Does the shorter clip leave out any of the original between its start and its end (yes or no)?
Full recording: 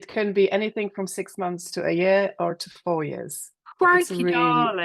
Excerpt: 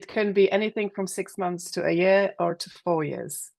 no